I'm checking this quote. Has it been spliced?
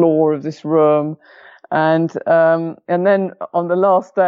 no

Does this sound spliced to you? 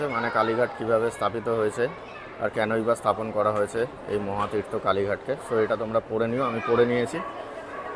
no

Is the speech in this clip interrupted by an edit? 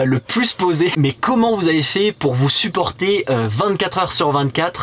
yes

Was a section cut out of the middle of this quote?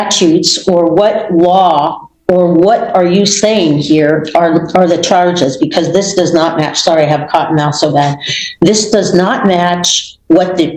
no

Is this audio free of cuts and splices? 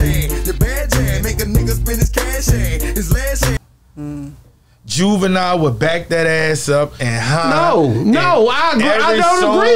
yes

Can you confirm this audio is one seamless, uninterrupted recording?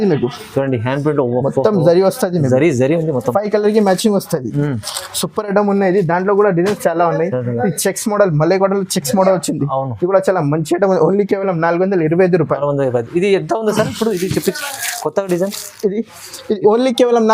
yes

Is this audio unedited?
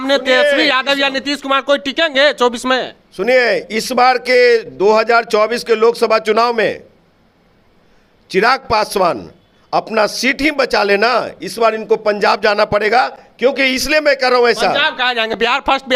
yes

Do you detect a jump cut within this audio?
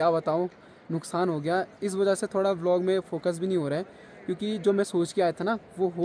no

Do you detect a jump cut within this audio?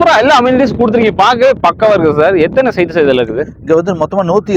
no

